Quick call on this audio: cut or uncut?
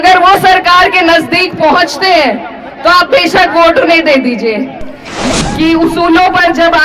cut